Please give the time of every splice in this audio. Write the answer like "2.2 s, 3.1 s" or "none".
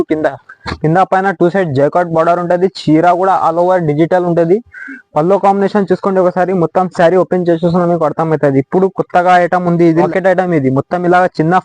10.1 s